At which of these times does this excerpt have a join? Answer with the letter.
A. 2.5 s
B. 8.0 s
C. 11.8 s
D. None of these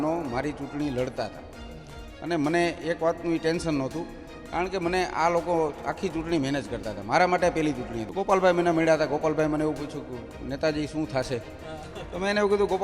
B